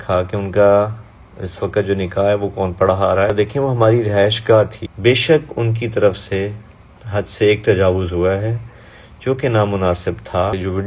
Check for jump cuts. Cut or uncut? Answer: cut